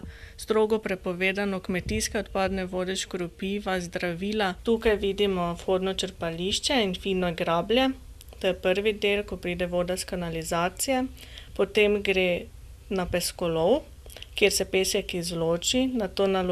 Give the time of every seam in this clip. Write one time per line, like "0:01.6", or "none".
0:04.6